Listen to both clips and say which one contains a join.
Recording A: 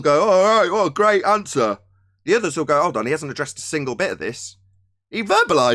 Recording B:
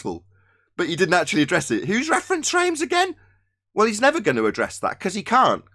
B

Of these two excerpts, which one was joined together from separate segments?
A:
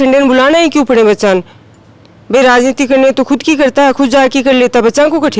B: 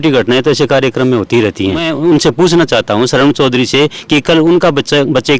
B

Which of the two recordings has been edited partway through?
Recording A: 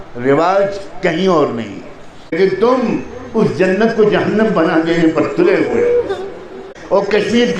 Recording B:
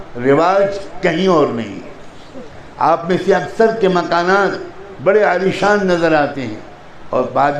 A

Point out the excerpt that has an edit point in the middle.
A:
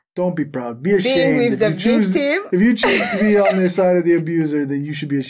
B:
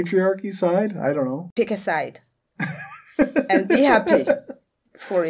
B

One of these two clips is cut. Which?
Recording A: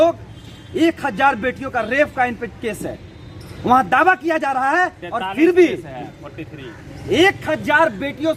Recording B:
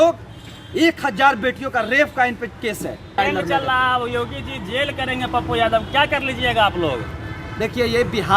B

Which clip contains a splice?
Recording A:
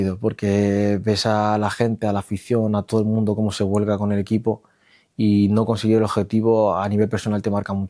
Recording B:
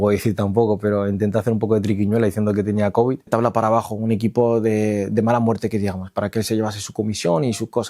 B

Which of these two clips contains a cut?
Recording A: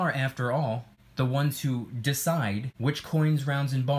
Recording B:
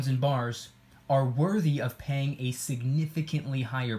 A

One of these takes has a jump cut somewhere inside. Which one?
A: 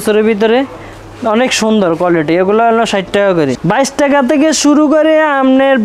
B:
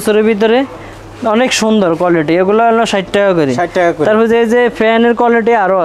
A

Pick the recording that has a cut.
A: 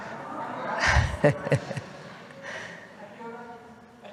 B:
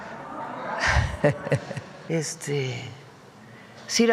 B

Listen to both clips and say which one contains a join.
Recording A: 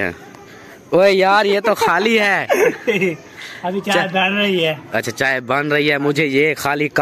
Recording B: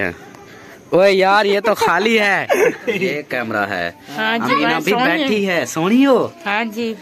B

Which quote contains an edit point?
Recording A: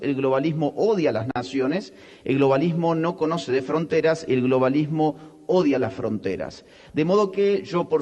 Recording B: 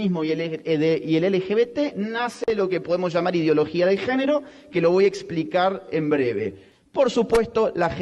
B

